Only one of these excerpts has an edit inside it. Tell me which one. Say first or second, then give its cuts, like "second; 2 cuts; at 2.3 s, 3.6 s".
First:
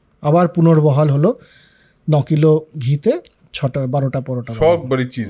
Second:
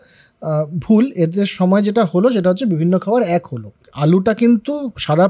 second; 1 cut; at 3.7 s